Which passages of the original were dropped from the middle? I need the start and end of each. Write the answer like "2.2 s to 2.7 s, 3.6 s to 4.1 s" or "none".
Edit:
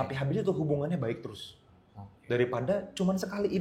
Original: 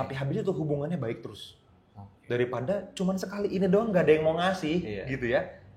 none